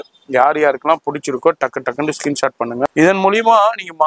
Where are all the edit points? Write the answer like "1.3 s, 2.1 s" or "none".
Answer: 2.9 s